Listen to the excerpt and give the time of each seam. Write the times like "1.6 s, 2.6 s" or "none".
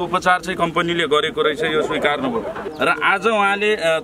2.6 s